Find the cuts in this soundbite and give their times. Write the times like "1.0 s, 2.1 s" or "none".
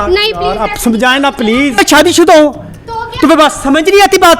1.8 s

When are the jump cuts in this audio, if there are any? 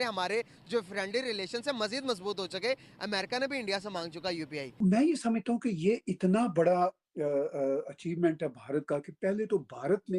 4.8 s

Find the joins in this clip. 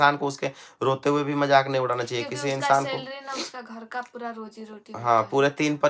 none

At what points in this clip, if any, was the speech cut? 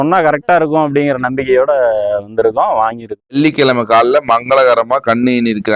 3.4 s

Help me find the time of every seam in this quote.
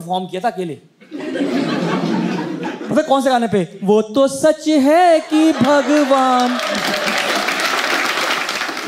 none

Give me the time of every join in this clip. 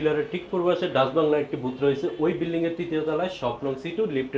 none

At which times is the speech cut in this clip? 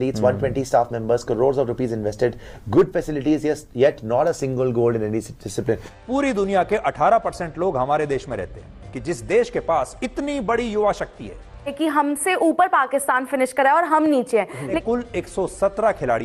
5.9 s, 8.9 s, 11.8 s, 14.8 s

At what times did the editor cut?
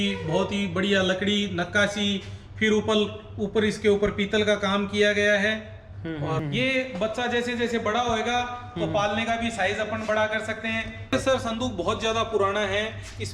6.4 s, 11.1 s

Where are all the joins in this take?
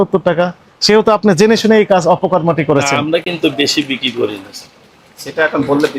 none

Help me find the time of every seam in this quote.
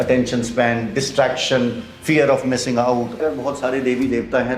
3.2 s

